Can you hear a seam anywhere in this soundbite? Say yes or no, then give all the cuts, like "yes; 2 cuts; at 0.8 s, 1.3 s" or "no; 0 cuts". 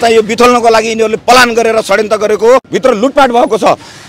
yes; 1 cut; at 2.7 s